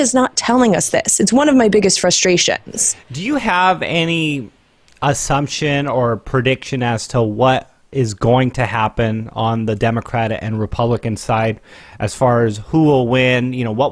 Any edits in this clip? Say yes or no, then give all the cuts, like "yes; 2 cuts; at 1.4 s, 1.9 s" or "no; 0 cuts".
no; 0 cuts